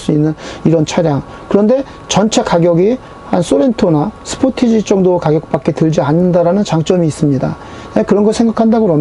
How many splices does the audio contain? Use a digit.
0